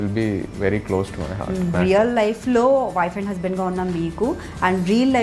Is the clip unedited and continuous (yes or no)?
no